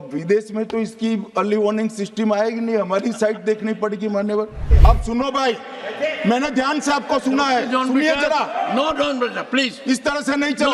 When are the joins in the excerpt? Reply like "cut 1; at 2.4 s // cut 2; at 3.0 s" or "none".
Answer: cut 1; at 4.7 s